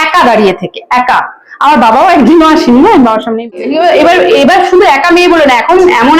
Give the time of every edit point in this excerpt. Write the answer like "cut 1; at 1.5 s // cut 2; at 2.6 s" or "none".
cut 1; at 3.5 s